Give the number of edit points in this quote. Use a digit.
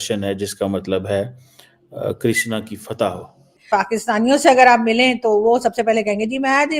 1